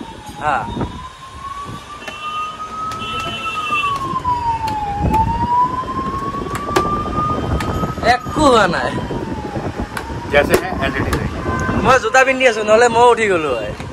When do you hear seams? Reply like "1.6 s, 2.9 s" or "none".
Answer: none

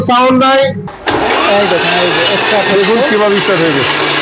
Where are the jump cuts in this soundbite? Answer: 0.9 s

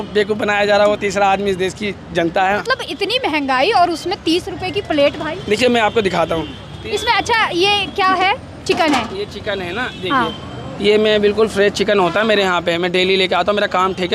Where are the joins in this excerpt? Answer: 2.6 s

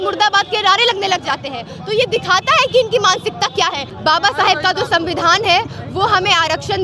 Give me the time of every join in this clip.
4.1 s

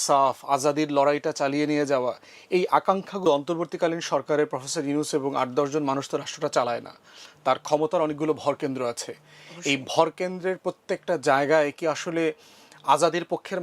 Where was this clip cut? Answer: 3.2 s

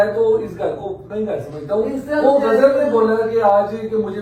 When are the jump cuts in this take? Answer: none

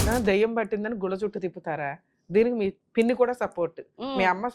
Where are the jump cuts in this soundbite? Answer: 2.8 s

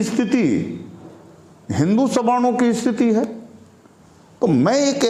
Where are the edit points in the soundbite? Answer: none

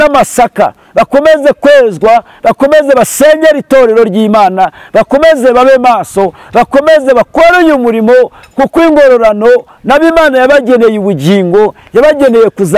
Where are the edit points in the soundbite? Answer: none

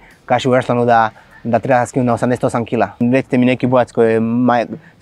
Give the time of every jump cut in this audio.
3.0 s

